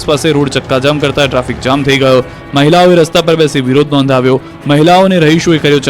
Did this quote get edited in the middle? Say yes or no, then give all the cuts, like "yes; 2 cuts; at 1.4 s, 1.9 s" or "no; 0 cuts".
yes; 1 cut; at 1.8 s